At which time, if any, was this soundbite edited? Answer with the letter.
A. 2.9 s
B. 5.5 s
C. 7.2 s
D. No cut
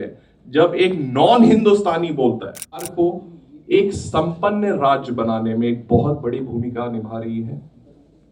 A